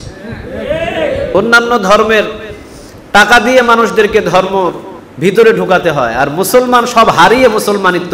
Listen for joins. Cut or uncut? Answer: cut